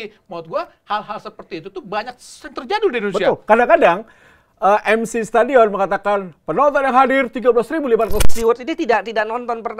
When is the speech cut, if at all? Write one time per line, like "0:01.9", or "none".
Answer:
0:08.2